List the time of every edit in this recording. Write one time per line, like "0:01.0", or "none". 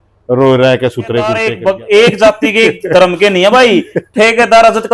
0:01.5